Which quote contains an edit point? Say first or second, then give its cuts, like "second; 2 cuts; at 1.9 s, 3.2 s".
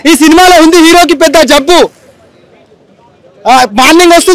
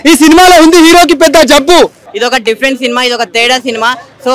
second; 1 cut; at 2.0 s